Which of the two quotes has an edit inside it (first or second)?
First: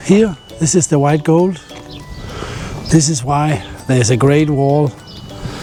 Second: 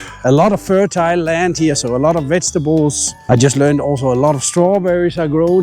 second